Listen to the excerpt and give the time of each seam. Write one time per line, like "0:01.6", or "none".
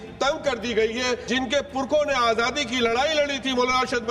0:01.2